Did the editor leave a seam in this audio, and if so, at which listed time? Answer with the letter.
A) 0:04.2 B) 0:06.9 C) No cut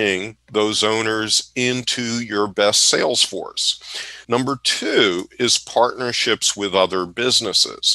A